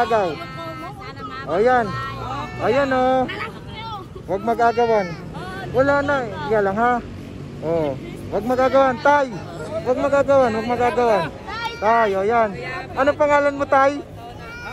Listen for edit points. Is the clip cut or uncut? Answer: uncut